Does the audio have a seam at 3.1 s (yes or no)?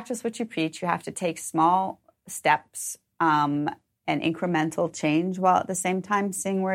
no